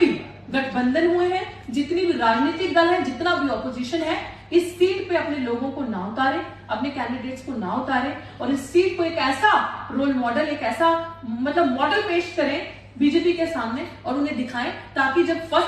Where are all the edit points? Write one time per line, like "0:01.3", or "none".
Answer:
none